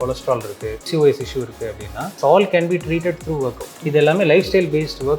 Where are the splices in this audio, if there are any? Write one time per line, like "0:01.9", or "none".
0:00.9
0:02.0
0:03.8